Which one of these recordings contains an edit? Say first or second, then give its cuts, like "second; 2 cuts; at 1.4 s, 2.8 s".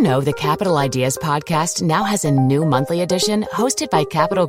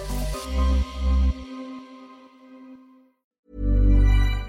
second; 1 cut; at 3.1 s